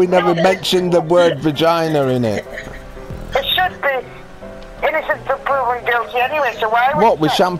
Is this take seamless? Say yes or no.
yes